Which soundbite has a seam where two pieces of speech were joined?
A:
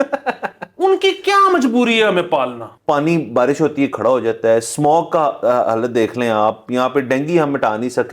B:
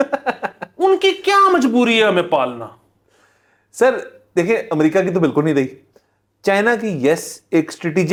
A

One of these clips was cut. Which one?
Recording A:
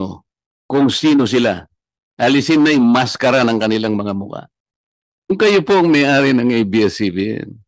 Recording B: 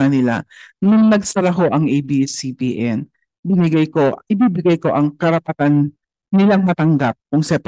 A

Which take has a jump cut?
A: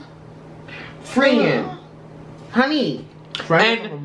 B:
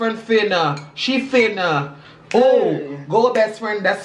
A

